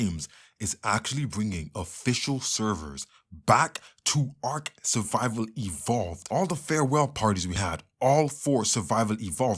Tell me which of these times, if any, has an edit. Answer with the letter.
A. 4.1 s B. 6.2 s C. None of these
B